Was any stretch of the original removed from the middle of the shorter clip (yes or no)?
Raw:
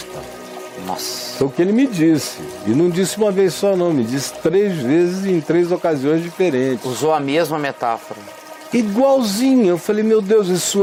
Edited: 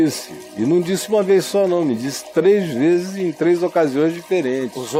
no